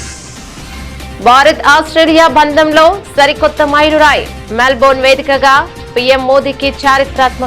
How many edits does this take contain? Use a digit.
1